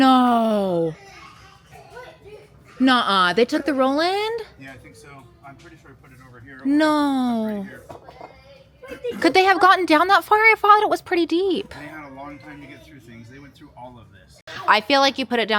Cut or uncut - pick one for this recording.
uncut